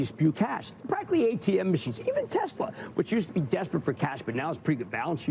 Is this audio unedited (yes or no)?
yes